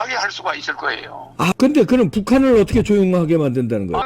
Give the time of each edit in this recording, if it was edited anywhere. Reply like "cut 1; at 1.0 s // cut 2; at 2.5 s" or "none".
cut 1; at 1.5 s